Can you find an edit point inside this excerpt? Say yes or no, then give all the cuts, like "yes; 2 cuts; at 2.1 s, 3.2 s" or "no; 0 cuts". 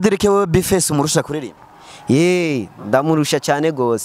no; 0 cuts